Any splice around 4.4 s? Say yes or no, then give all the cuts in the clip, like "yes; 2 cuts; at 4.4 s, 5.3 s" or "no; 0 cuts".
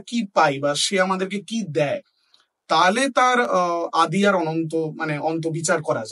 no; 0 cuts